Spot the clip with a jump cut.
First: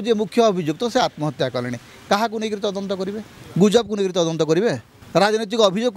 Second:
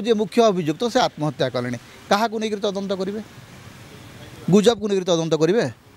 first; 2 cuts; at 3.3 s, 4.9 s

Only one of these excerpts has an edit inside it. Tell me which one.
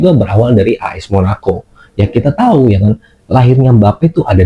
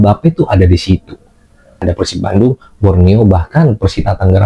second; 1 cut; at 1.8 s

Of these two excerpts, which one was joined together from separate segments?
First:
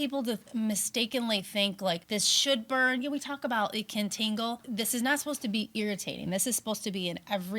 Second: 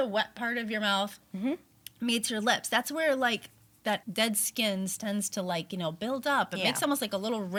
first; 2 cuts; at 2.0 s, 4.6 s

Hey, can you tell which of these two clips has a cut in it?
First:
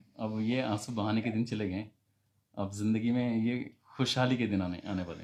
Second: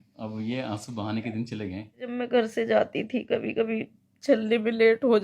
second; 1 cut; at 2.1 s

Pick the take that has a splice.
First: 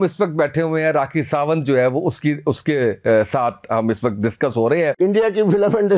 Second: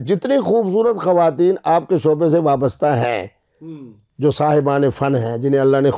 first; 2 cuts; at 1.3 s, 5.0 s

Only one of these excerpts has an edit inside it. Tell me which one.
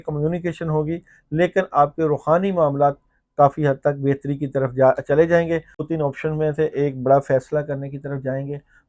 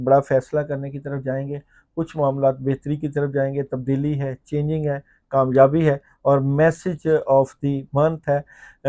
first; 1 cut; at 5.7 s

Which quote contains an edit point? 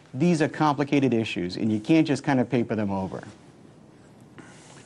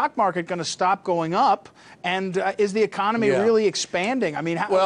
first; 1 cut; at 2.2 s

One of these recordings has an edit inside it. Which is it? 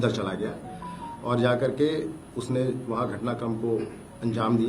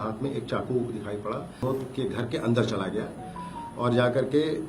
second; 1 cut; at 1.6 s

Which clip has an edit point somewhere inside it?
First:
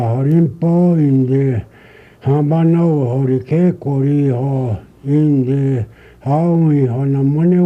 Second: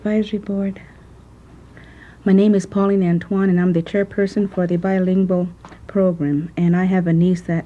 second; 1 cut; at 2.9 s

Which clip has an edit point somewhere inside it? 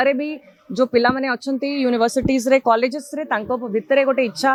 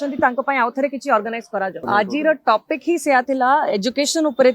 second; 1 cut; at 1.8 s

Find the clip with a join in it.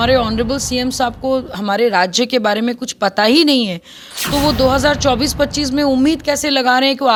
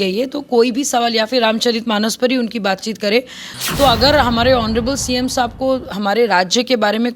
second; 1 cut; at 3.4 s

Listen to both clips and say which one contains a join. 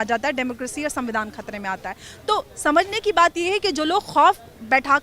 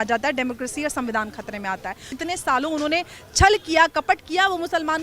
second; 1 cut; at 2.2 s

